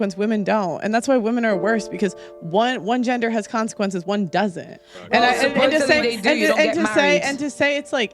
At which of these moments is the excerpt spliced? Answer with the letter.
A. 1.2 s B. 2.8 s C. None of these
A